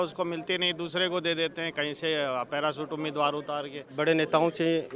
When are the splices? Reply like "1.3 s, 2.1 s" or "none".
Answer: 3.8 s